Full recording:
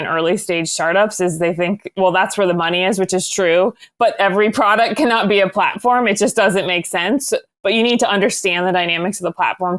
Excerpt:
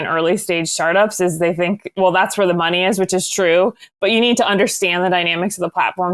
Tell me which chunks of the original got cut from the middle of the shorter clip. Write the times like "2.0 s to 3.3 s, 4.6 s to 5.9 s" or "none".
3.9 s to 7.5 s